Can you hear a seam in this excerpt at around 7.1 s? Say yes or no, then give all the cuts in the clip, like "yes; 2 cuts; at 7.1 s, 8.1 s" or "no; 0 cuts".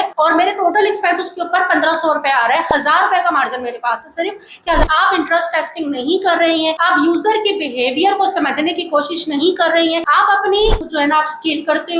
no; 2 cuts; at 4.8 s, 10.8 s